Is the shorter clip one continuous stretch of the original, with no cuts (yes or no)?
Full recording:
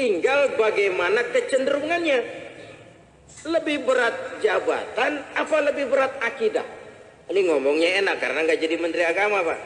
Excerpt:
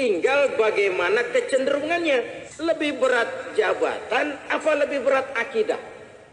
no